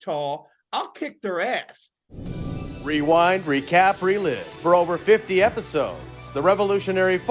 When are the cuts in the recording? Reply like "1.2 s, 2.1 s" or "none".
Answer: 2.2 s